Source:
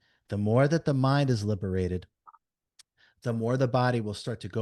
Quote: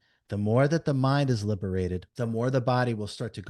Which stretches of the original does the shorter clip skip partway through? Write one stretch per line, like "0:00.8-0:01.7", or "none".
0:02.1-0:03.1